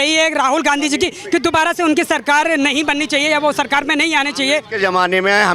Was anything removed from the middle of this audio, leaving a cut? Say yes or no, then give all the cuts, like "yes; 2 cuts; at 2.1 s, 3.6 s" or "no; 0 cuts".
no; 0 cuts